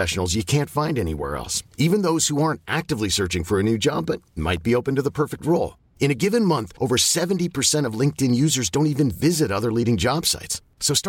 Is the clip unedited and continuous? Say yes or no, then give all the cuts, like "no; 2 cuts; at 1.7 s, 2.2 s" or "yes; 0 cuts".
yes; 0 cuts